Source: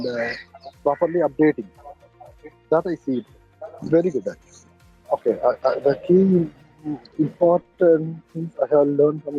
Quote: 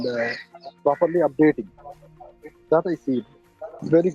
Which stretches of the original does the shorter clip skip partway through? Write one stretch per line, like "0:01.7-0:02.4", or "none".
none